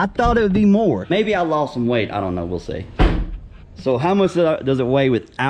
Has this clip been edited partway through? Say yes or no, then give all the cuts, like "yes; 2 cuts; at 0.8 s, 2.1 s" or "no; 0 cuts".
no; 0 cuts